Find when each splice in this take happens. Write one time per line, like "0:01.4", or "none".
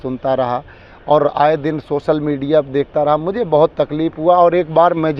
none